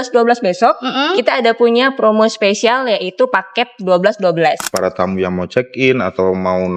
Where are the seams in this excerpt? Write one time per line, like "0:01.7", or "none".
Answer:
0:04.7

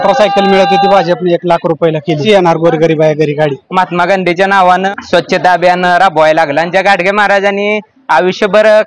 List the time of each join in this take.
0:02.2
0:03.6
0:04.9

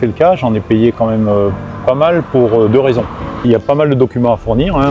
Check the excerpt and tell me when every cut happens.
0:03.4

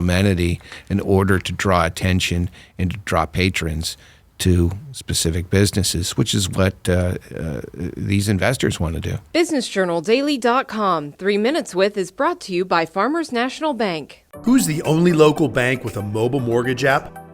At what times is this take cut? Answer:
0:09.1

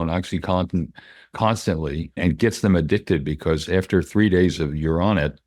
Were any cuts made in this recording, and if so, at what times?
0:02.2

